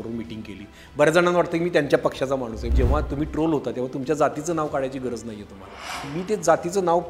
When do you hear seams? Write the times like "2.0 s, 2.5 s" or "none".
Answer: 2.7 s, 6.0 s